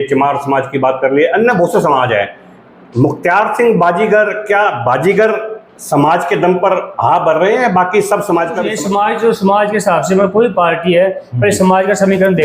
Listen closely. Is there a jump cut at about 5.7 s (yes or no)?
no